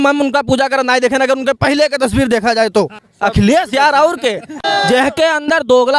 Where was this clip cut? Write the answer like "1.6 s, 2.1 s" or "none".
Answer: 3.0 s, 4.6 s